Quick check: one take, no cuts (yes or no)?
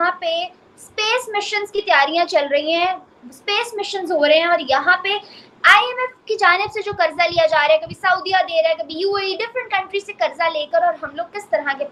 yes